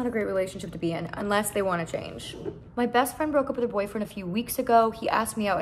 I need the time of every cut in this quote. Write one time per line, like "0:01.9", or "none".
none